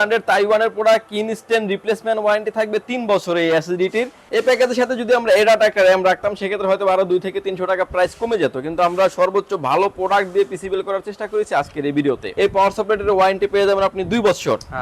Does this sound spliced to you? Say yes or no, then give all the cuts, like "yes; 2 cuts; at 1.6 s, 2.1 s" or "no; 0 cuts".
yes; 2 cuts; at 4.2 s, 12.3 s